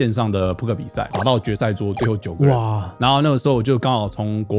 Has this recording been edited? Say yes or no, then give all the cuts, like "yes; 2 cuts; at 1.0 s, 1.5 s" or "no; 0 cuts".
yes; 2 cuts; at 1.1 s, 2.8 s